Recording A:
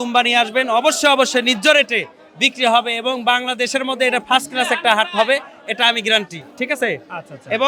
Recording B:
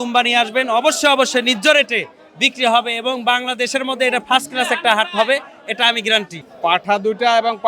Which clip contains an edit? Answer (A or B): B